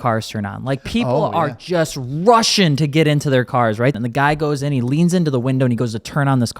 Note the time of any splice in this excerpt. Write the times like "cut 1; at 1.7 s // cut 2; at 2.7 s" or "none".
cut 1; at 3.9 s